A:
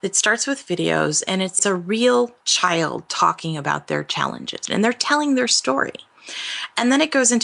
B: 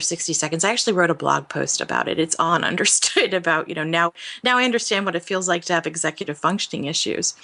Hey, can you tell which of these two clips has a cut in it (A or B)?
A